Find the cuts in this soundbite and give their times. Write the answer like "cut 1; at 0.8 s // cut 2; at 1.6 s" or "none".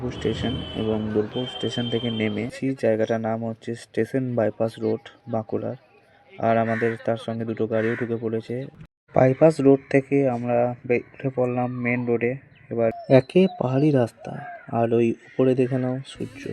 cut 1; at 2.6 s // cut 2; at 8.7 s // cut 3; at 13.0 s